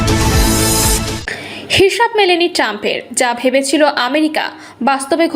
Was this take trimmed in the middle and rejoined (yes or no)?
yes